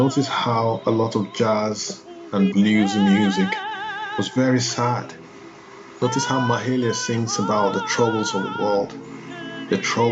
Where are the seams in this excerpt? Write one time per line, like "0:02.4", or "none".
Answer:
none

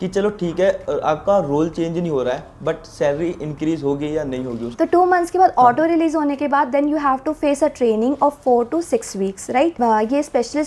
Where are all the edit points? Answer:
0:04.7
0:09.7

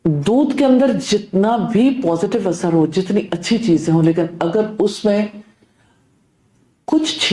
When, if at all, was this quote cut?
none

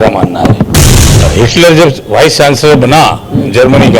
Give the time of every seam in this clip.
0:01.2

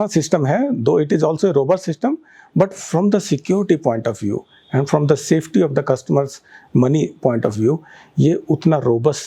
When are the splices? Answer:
none

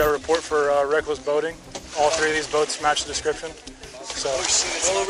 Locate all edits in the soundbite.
none

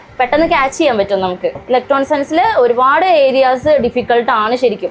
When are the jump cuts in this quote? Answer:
0:01.6

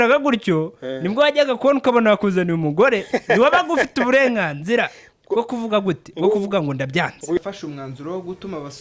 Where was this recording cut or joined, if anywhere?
0:07.4

